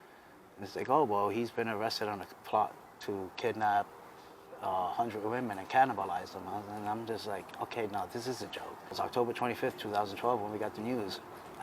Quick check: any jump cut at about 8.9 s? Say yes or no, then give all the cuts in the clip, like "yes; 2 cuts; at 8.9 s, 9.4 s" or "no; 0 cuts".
yes; 1 cut; at 8.9 s